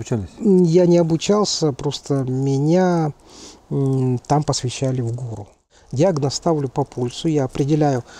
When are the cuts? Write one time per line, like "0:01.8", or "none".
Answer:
0:05.8